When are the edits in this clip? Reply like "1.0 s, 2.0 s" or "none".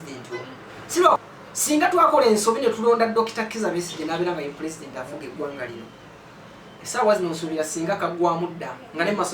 1.2 s